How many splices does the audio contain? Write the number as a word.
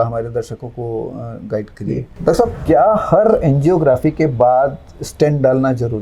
one